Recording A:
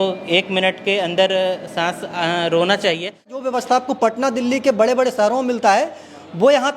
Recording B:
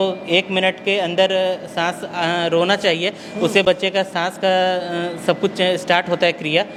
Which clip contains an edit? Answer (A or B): A